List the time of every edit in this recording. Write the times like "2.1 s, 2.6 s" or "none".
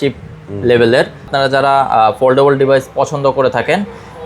1.3 s